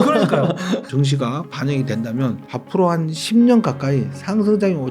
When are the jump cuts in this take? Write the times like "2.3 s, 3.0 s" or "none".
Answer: 0.9 s, 2.5 s